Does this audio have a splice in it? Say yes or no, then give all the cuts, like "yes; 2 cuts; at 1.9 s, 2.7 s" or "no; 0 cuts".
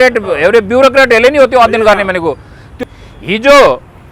yes; 1 cut; at 2.8 s